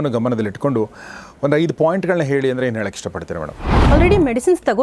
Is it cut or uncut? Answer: cut